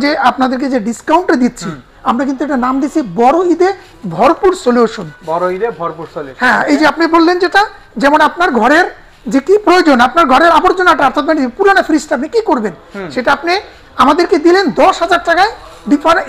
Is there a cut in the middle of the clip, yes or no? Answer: no